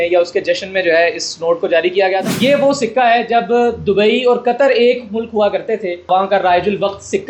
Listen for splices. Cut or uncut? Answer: cut